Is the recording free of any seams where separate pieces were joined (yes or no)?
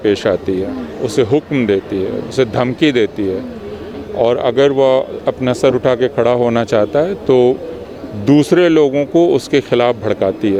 yes